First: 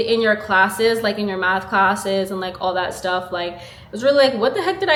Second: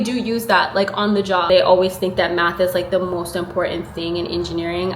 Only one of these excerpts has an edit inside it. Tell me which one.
second; 1 cut; at 1.5 s

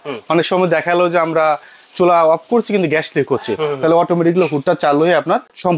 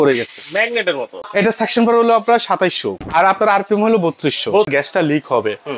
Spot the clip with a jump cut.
second; 3 cuts; at 1.2 s, 3.0 s, 4.7 s

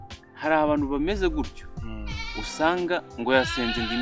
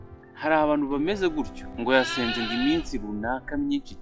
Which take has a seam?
second; 1 cut; at 1.7 s

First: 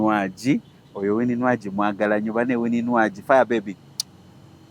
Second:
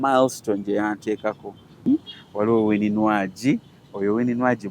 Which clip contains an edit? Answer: second; 1 cut; at 1.8 s

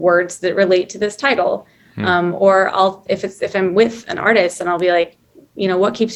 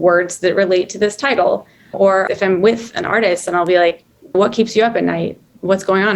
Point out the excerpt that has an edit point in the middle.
second; 2 cuts; at 2.1 s, 4.3 s

